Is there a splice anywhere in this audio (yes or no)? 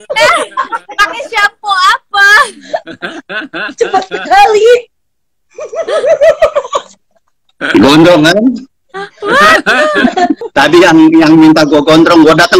yes